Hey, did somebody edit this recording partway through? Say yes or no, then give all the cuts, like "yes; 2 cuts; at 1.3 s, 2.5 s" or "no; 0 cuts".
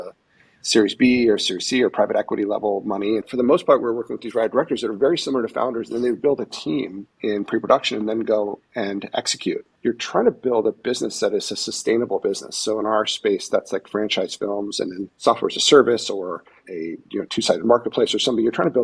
yes; 5 cuts; at 3.2 s, 7.0 s, 9.7 s, 15.1 s, 16.6 s